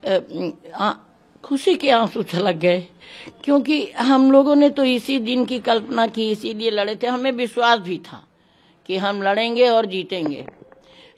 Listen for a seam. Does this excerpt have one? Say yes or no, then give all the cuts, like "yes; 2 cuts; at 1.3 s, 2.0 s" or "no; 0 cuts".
no; 0 cuts